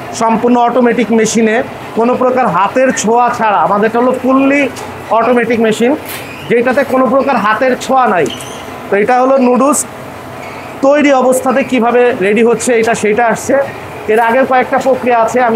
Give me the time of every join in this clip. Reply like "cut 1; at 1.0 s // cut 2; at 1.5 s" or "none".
none